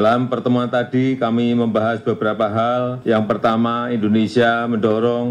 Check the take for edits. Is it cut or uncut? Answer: cut